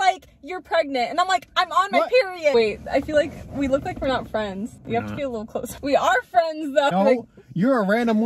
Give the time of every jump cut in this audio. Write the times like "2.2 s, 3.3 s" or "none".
2.5 s, 4.8 s, 5.7 s, 6.9 s